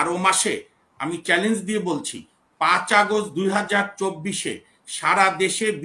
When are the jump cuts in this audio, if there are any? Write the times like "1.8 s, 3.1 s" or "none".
none